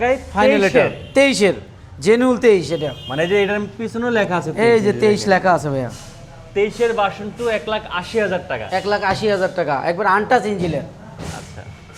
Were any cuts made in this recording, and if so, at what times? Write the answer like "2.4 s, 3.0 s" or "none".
none